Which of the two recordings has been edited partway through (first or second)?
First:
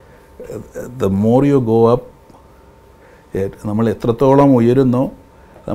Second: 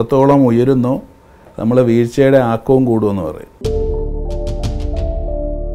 second